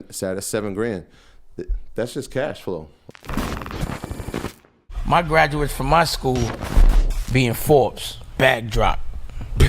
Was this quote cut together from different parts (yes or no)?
yes